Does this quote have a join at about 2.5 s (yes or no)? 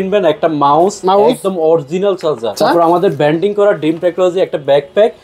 yes